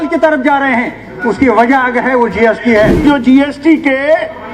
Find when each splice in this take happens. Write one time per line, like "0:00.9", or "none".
0:03.0